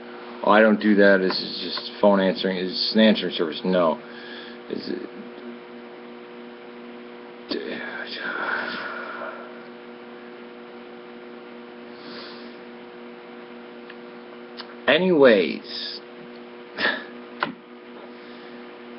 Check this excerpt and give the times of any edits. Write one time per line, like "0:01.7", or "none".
none